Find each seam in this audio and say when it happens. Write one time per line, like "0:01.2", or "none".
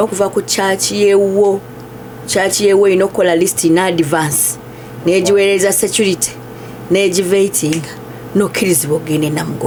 none